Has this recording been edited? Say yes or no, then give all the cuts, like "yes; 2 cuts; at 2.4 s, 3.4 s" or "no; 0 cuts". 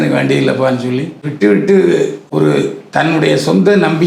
yes; 2 cuts; at 1.3 s, 2.2 s